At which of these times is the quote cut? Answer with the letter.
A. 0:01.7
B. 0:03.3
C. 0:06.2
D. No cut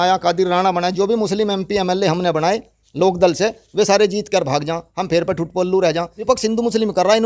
C